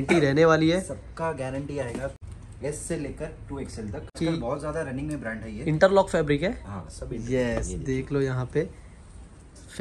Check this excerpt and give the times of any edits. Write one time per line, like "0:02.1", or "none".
0:02.2
0:04.1